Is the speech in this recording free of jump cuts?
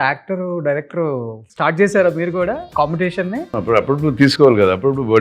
no; 3 cuts; at 1.4 s, 2.7 s, 3.5 s

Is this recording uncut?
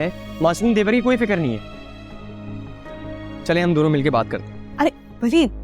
yes; 0 cuts

